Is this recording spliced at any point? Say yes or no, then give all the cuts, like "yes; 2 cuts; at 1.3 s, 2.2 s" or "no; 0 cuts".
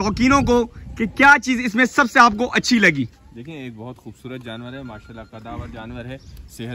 no; 0 cuts